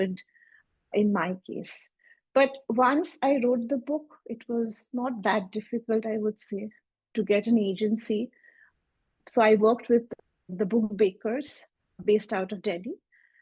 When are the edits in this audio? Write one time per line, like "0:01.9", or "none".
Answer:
none